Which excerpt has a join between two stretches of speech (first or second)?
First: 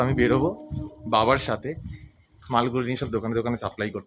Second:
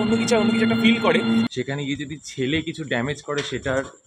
second